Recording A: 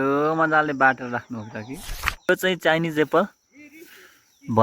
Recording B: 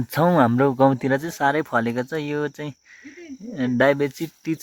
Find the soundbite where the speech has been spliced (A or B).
A